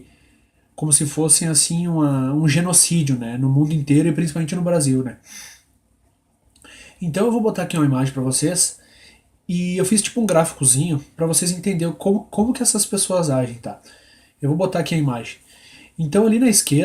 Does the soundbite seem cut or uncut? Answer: uncut